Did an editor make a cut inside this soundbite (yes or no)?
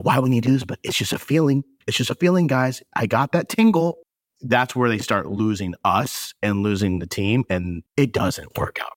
yes